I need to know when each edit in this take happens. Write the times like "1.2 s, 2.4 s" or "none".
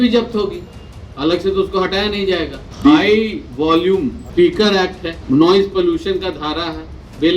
2.6 s, 4.2 s, 5.1 s